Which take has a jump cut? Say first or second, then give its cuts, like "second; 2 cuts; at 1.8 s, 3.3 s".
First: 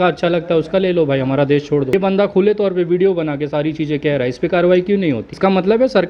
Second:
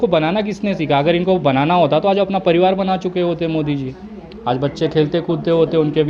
first; 2 cuts; at 1.9 s, 5.3 s